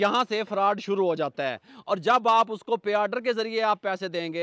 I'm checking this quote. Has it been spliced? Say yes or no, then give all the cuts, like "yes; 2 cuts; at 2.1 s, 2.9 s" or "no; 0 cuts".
no; 0 cuts